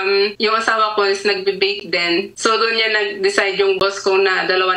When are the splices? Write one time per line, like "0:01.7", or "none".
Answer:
none